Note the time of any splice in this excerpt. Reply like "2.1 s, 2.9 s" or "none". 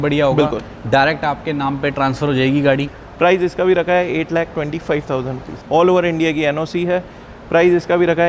2.9 s, 5.5 s